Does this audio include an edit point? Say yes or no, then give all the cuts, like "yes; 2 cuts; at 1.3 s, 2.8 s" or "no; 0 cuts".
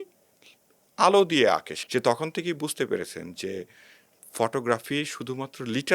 yes; 1 cut; at 1.8 s